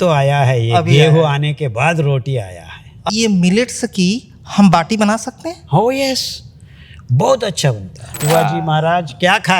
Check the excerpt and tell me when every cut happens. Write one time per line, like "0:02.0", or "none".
0:03.1
0:08.1